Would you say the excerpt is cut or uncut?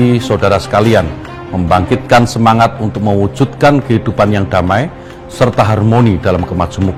uncut